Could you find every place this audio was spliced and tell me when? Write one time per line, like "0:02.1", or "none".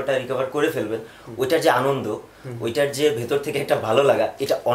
none